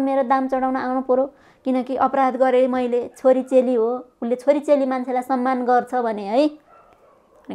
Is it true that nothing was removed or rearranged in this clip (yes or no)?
yes